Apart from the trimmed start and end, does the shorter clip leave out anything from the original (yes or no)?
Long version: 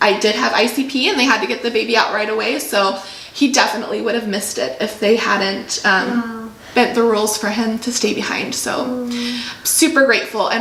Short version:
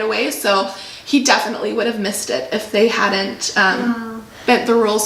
no